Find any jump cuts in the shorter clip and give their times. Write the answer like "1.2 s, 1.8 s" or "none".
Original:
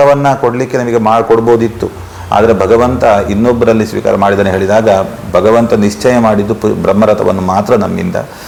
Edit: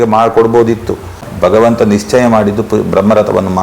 1.2 s